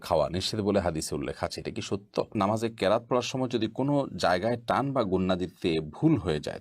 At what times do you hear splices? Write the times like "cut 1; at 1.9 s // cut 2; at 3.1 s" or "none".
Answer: cut 1; at 2.3 s